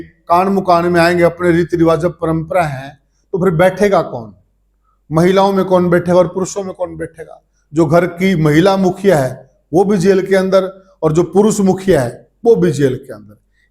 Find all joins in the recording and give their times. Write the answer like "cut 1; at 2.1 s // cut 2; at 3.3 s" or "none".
none